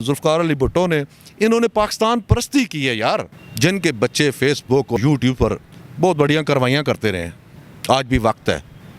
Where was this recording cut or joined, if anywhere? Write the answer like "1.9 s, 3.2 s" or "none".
3.4 s, 5.0 s